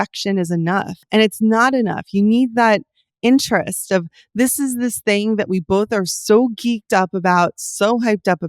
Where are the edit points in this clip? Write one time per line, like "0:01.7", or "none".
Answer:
0:01.0